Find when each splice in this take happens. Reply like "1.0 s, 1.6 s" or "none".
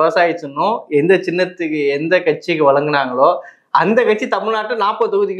none

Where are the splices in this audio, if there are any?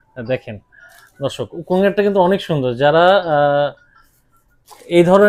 none

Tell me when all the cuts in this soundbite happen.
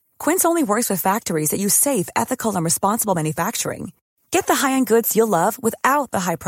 none

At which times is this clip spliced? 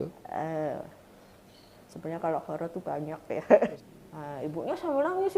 3.7 s

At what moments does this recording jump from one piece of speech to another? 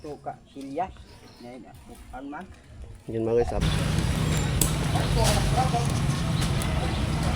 3.6 s

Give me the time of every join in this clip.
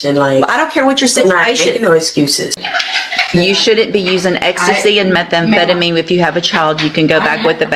2.6 s

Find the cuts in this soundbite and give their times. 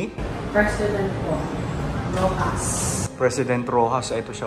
none

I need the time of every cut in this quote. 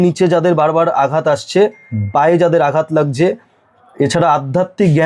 none

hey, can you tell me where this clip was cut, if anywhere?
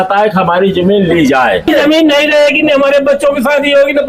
1.7 s

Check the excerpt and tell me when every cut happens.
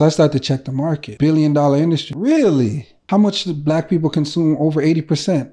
1.1 s, 2.1 s, 2.9 s

